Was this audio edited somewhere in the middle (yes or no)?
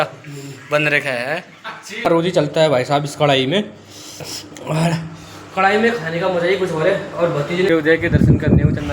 yes